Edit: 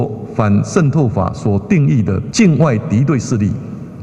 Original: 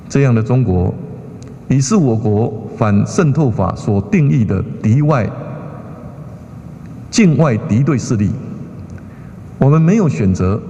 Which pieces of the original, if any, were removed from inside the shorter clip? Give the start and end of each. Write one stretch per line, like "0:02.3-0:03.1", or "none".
0:04.7-0:07.0